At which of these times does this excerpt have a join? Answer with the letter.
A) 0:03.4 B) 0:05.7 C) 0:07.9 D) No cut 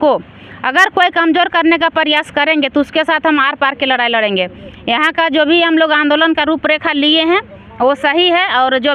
D